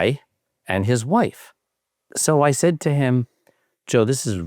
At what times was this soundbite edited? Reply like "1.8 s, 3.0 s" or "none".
2.1 s